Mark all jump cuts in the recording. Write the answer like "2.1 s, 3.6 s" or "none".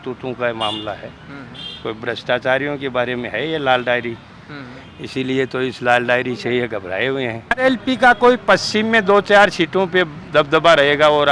7.6 s